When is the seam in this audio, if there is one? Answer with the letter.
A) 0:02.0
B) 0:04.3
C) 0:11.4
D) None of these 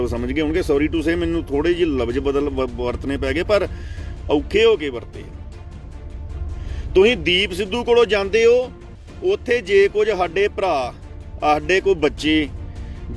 D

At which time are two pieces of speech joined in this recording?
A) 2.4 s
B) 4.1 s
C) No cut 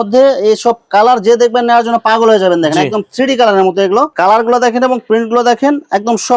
B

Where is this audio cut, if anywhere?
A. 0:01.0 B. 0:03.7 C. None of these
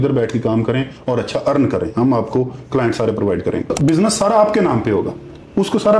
B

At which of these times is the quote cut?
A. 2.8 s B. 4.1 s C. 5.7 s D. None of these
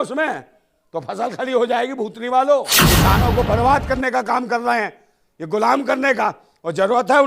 A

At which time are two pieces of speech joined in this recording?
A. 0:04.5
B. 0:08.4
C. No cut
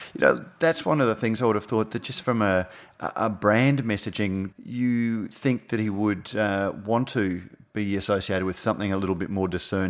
A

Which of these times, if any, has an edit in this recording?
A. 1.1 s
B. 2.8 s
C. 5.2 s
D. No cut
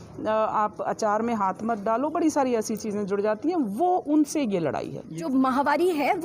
C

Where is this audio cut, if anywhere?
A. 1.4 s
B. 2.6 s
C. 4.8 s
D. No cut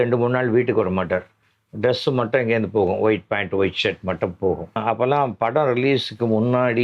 C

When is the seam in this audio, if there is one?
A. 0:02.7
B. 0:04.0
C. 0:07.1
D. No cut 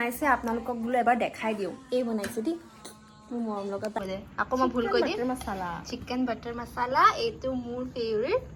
B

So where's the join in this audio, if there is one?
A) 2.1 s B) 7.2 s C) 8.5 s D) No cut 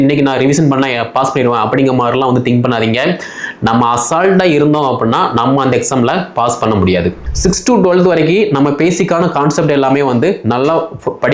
B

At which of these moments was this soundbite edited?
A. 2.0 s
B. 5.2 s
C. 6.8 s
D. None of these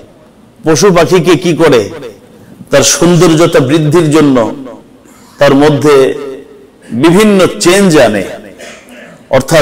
D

